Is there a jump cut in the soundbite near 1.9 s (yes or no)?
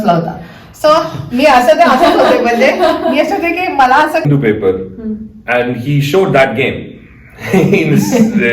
no